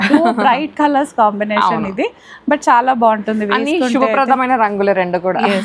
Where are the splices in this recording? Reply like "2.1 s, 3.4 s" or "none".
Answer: none